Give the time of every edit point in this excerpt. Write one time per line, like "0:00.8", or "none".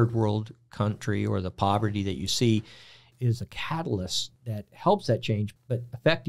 0:03.0
0:04.3
0:05.5